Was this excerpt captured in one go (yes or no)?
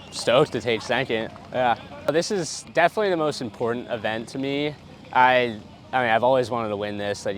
no